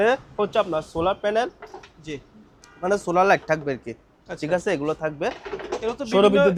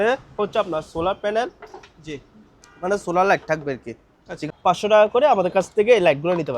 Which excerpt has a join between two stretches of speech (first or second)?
second